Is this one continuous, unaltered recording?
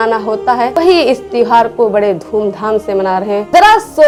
yes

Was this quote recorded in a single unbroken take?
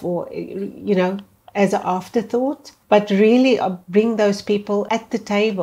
no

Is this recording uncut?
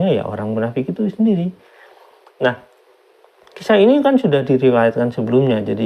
yes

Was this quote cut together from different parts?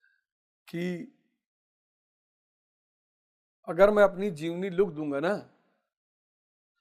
no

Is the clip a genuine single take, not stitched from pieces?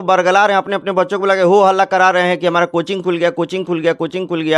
yes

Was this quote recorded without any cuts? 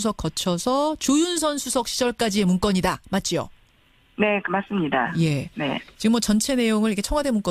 no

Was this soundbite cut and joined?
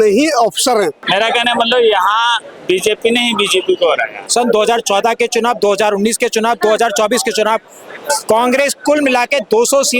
yes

